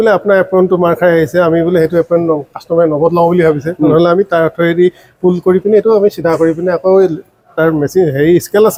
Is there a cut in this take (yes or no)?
no